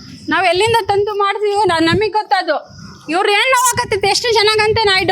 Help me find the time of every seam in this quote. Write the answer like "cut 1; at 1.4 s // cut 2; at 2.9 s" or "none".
none